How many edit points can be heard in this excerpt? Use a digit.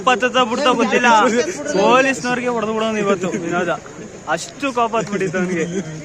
1